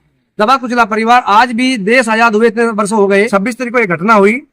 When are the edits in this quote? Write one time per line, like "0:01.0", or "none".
0:03.3